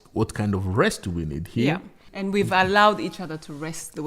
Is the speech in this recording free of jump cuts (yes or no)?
no